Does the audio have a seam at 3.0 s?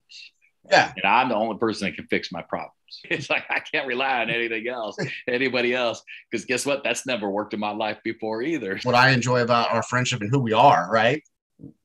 yes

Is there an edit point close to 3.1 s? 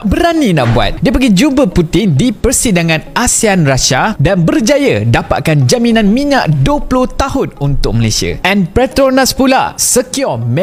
no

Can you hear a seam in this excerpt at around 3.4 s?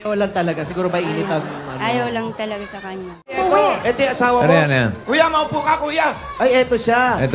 yes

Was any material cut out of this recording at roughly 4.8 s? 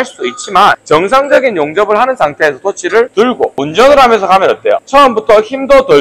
yes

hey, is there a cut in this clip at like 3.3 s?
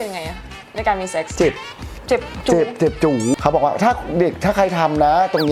yes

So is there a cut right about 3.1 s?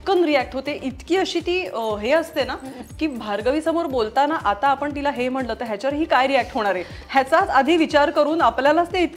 no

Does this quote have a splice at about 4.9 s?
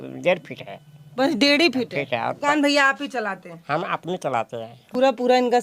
yes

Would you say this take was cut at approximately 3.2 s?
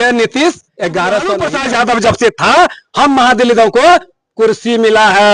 no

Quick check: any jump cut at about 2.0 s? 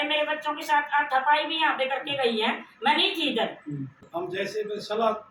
no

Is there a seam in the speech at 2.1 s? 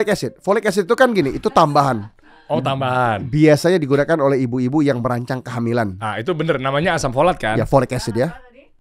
no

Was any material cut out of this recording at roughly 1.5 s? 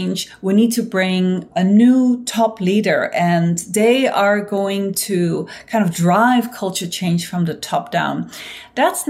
yes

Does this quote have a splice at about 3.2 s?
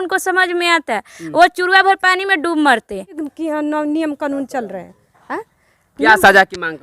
yes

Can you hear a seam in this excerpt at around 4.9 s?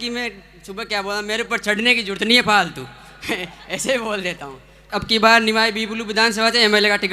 yes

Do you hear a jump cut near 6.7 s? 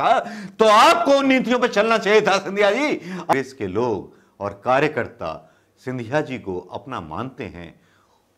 no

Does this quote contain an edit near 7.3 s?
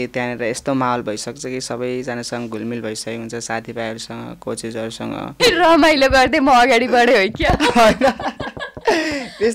no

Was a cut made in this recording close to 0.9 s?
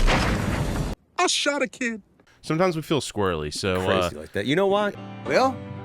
yes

